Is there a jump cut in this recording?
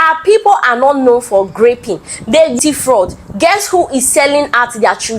yes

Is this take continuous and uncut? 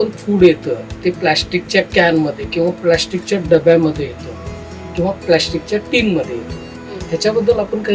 yes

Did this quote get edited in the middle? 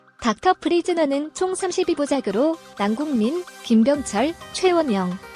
yes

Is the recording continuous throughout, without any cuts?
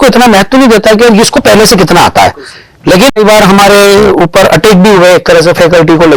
no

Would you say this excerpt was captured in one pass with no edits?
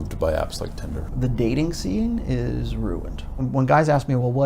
no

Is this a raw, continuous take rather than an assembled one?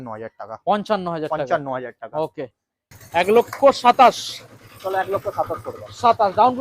no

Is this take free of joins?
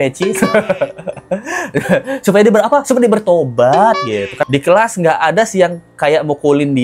no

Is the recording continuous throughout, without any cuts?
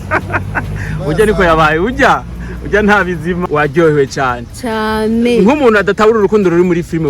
no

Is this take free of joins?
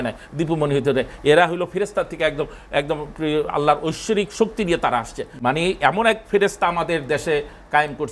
no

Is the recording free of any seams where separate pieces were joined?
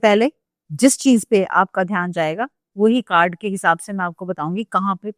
yes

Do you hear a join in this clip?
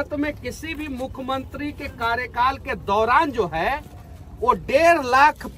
no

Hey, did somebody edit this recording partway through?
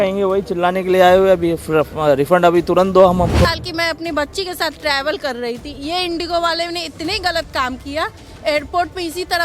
yes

